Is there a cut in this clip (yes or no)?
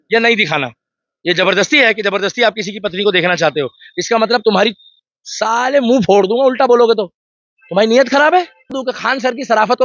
yes